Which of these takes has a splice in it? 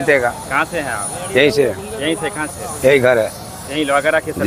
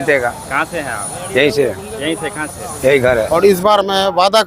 second; 1 cut; at 3.3 s

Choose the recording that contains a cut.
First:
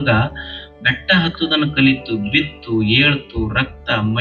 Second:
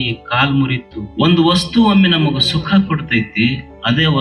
second; 1 cut; at 1.0 s

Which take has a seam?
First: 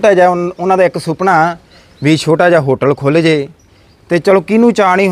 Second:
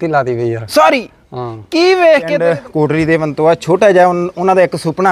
second; 1 cut; at 2.4 s

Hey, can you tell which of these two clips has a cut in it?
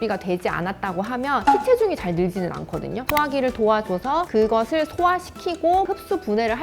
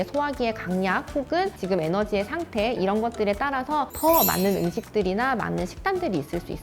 first; 4 cuts; at 1.4 s, 3.0 s, 4.3 s, 5.9 s

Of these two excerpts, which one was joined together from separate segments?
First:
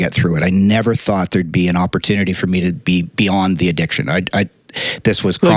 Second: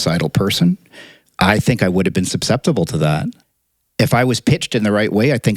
second; 2 cuts; at 1.1 s, 3.3 s

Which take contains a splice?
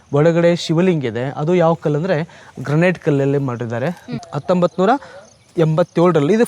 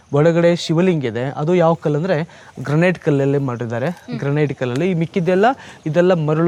first; 1 cut; at 4.1 s

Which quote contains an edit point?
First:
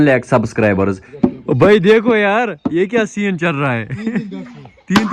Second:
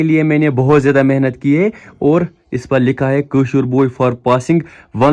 first; 1 cut; at 1.0 s

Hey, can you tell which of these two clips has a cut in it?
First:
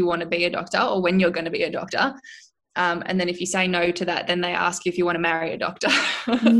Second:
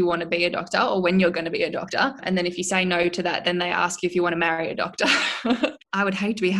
second; 2 cuts; at 2.2 s, 5.6 s

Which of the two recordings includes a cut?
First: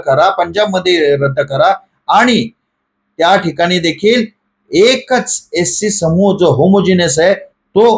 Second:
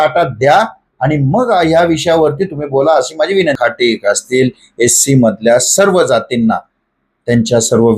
second; 1 cut; at 3.6 s

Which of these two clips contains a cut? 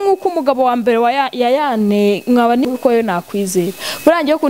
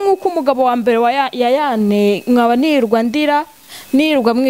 first; 1 cut; at 2.6 s

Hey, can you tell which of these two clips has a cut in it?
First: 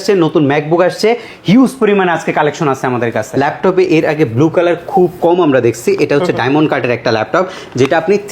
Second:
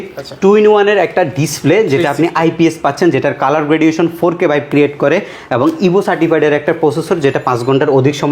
first; 1 cut; at 3.2 s

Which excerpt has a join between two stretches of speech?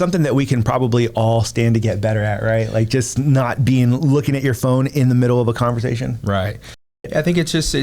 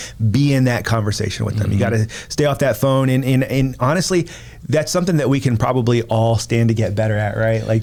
first; 1 cut; at 6.8 s

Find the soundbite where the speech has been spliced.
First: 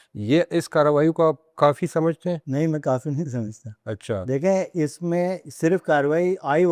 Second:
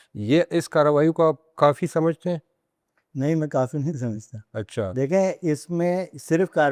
first; 1 cut; at 2.4 s

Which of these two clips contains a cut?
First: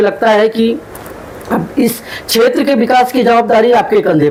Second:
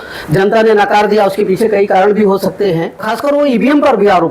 second; 1 cut; at 3.1 s

